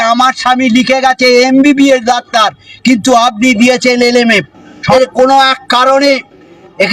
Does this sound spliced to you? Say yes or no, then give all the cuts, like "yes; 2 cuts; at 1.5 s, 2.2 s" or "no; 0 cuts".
yes; 1 cut; at 4.9 s